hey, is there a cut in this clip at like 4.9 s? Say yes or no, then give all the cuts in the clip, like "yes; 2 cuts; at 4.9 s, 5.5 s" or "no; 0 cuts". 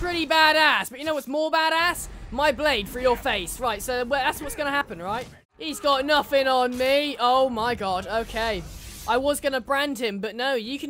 yes; 1 cut; at 4.9 s